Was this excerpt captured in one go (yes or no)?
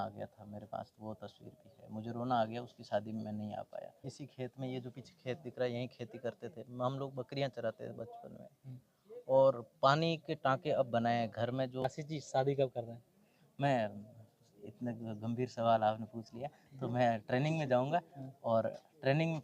no